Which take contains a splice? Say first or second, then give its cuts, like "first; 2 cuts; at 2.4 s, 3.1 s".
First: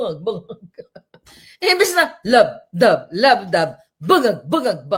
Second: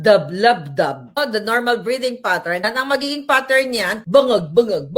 second; 3 cuts; at 1.2 s, 2.7 s, 4.0 s